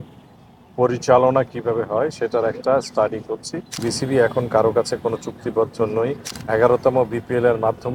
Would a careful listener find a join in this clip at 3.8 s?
yes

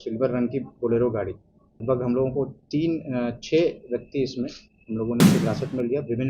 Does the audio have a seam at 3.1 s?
no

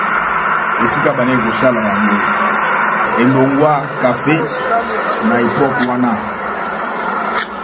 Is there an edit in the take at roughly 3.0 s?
yes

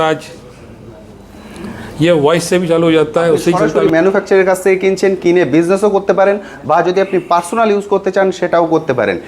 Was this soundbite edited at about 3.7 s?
yes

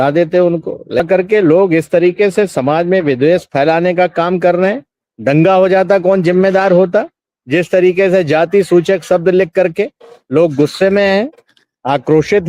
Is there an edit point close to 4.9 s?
no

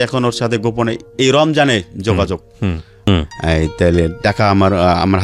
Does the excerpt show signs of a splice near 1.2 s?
no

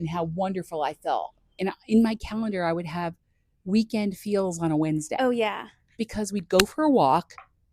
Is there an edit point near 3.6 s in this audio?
no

